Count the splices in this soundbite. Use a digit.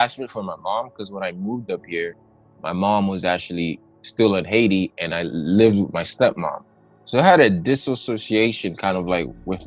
0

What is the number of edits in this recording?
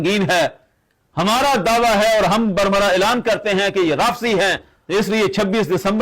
1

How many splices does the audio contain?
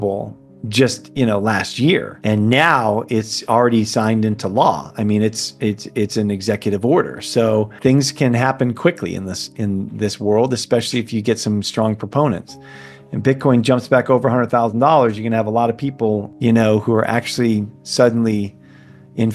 4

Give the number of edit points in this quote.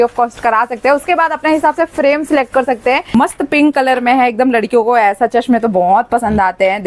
1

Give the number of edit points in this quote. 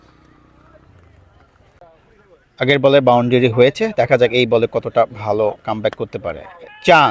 1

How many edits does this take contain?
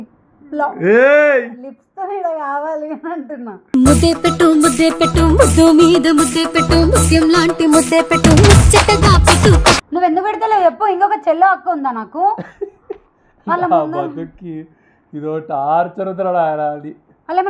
1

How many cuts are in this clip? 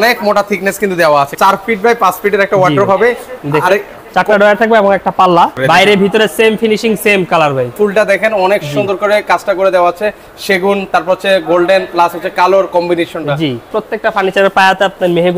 4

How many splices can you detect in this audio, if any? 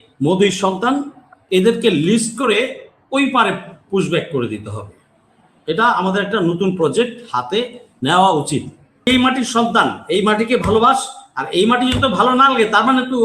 1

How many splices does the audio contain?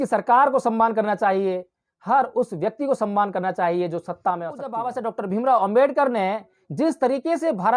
1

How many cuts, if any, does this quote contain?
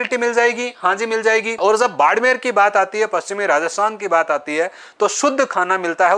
1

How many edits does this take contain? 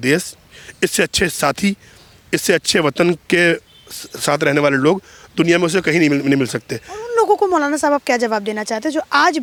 0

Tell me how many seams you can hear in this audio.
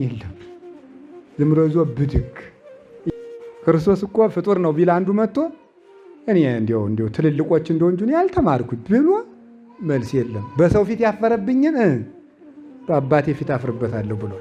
1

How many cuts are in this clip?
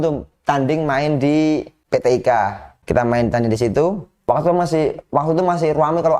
3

